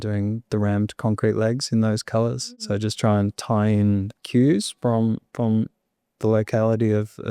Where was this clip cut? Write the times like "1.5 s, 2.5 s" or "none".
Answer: 2.5 s, 4.1 s